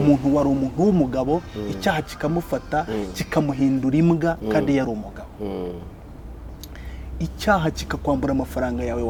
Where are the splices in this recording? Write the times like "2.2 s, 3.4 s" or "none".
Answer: none